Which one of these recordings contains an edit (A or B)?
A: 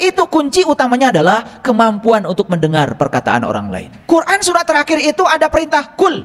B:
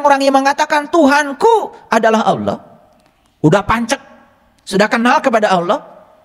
A